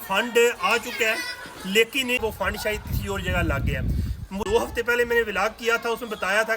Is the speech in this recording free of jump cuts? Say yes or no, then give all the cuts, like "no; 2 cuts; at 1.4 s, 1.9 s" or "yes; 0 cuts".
no; 2 cuts; at 2.2 s, 4.4 s